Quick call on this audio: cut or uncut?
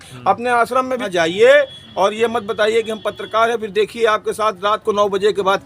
cut